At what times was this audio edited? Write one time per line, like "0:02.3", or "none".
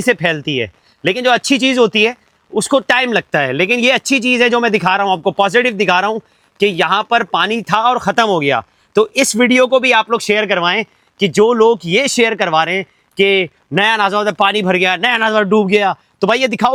none